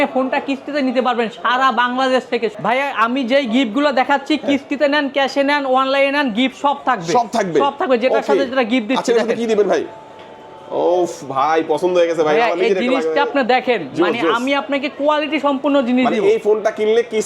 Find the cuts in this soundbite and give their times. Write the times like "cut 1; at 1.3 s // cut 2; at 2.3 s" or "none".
cut 1; at 2.5 s